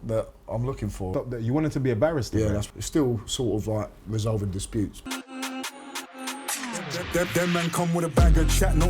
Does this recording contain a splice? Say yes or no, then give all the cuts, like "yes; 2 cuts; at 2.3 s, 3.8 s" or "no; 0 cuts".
yes; 3 cuts; at 1.1 s, 2.7 s, 5.0 s